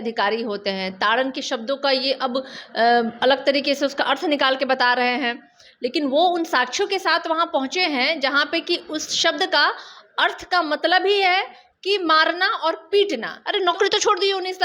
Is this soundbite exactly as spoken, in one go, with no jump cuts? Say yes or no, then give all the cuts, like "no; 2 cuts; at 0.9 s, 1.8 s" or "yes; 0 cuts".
no; 1 cut; at 13.3 s